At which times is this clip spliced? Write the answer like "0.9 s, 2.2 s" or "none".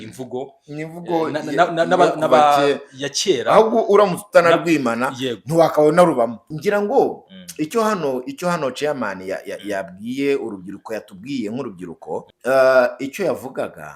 6.5 s, 12.3 s